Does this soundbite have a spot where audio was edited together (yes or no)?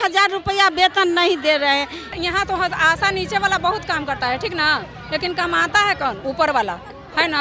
yes